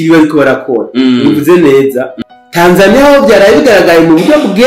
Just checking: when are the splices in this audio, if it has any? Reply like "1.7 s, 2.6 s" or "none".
2.1 s